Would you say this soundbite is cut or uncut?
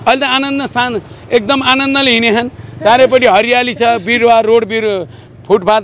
uncut